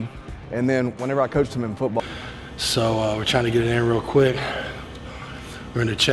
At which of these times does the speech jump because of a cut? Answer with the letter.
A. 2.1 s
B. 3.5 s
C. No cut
C